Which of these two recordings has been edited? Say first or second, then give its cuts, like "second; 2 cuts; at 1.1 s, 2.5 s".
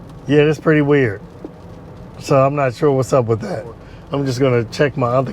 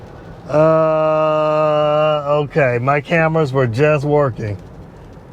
first; 1 cut; at 3.9 s